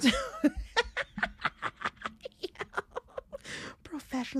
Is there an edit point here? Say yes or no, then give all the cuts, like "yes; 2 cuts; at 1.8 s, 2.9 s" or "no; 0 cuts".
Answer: no; 0 cuts